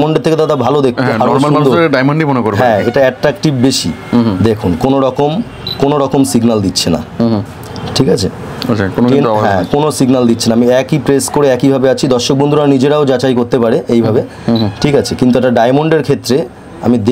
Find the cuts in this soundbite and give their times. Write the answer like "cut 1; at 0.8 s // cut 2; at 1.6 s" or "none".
none